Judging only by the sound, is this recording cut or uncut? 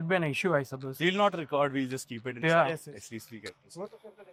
uncut